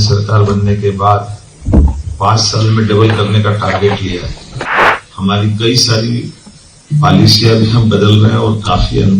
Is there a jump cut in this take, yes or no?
yes